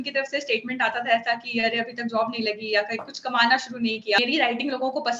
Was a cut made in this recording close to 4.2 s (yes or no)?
yes